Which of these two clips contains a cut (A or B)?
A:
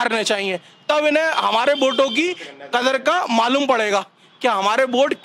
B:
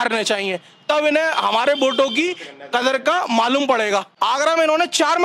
B